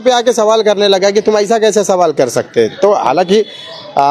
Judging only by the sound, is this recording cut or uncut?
uncut